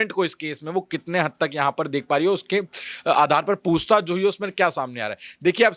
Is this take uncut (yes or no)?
yes